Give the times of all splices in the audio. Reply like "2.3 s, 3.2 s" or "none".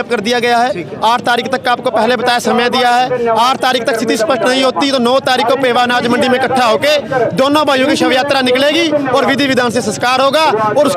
none